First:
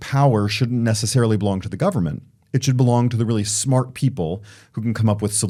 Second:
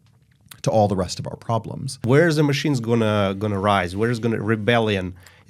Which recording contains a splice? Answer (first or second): second